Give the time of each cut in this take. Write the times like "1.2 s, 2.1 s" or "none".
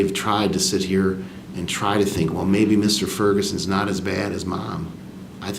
none